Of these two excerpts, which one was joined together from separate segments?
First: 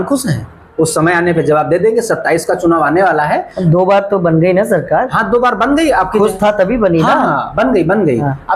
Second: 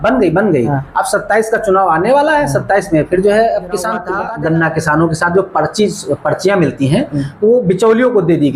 second; 1 cut; at 4.1 s

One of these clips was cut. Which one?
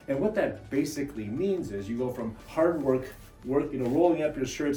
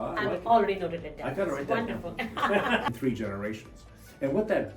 second; 1 cut; at 2.9 s

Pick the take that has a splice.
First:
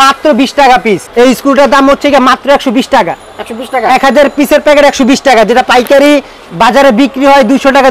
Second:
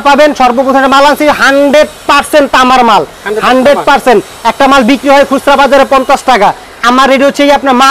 first; 1 cut; at 1.1 s

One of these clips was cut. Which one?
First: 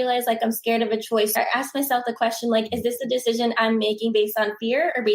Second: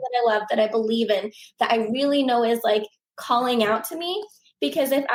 first; 1 cut; at 1.3 s

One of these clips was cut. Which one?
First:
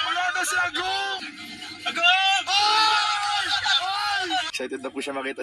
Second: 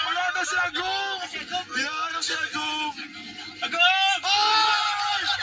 first; 2 cuts; at 1.2 s, 4.5 s

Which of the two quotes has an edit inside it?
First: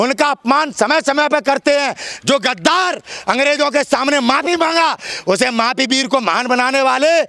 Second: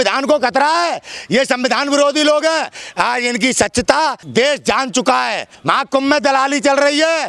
second; 3 cuts; at 2.8 s, 4.2 s, 5.5 s

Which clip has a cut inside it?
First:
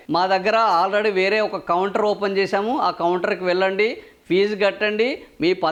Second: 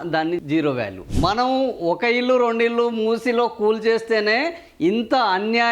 second; 1 cut; at 1.0 s

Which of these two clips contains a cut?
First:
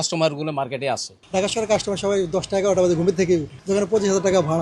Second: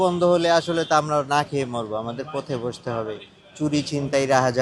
first; 2 cuts; at 1.1 s, 3.5 s

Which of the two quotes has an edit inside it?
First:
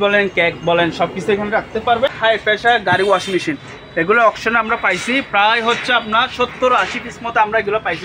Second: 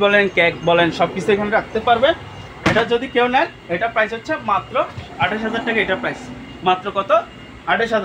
first; 1 cut; at 2.1 s

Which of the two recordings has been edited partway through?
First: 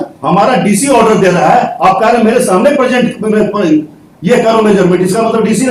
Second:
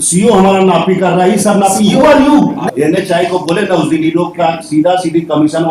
second; 1 cut; at 2.7 s

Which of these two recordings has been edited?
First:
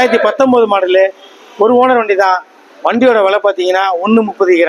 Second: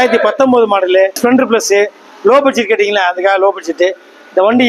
second; 1 cut; at 1.2 s

